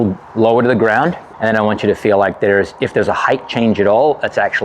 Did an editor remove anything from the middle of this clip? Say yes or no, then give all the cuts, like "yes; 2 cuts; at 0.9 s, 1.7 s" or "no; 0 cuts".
yes; 1 cut; at 1.3 s